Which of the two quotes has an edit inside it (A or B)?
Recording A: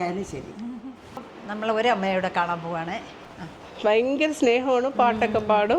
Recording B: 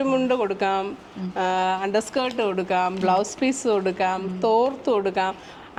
A